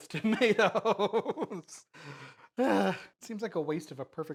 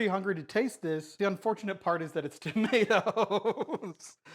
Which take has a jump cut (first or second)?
second